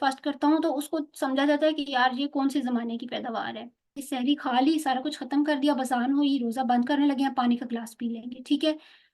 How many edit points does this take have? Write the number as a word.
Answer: one